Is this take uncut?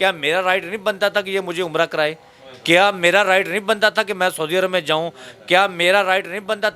yes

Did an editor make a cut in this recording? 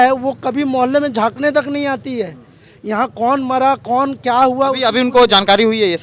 no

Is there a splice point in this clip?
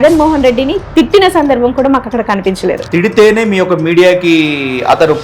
yes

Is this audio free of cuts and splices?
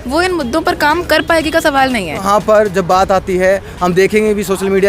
no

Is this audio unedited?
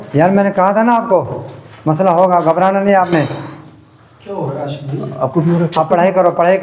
yes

